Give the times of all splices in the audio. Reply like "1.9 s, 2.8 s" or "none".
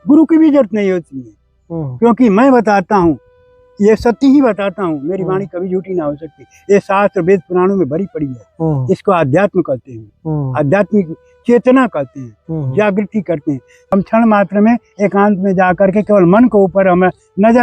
13.7 s